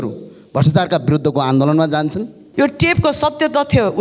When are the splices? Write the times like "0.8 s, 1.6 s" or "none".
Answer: 2.4 s